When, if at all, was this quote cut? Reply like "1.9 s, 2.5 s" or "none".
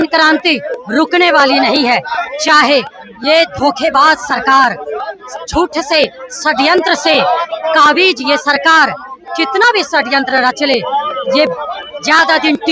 none